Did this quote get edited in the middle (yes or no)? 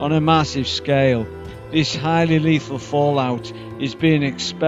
no